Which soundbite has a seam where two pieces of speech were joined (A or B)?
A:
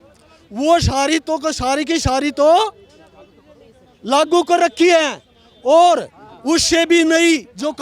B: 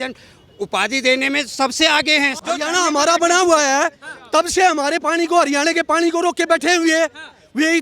B